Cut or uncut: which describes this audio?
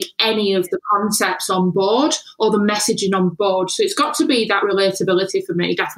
uncut